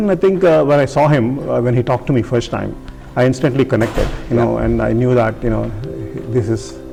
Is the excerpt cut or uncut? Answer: uncut